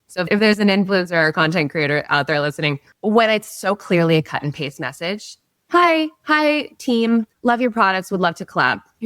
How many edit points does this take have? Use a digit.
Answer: 2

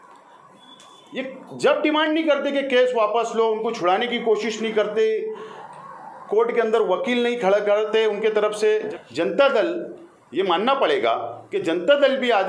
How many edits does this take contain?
1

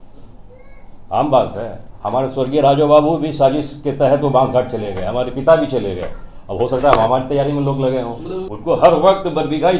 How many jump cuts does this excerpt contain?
1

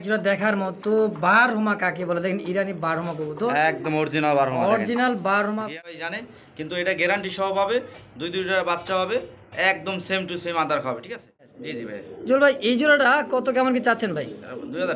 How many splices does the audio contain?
2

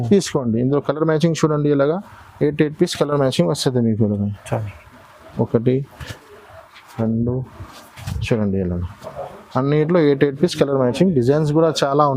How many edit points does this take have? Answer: 0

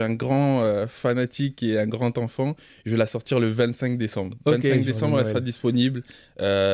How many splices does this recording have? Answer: 0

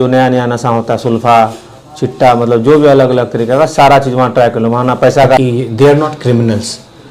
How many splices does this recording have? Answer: 1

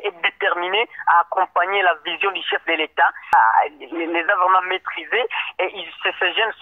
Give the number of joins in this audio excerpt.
1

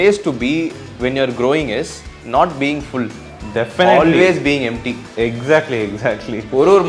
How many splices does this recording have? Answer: 0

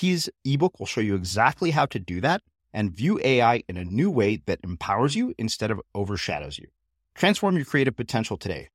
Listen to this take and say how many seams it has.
0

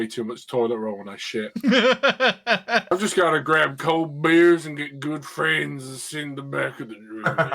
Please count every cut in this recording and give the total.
1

